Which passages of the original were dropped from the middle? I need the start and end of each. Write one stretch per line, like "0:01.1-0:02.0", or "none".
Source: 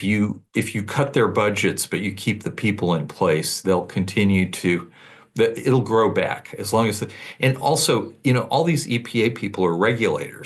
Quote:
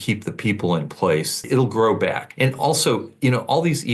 0:03.6-0:05.6
0:06.4-0:07.3